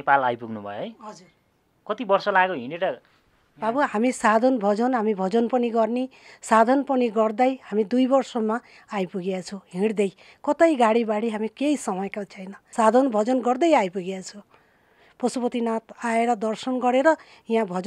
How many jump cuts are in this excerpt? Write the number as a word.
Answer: one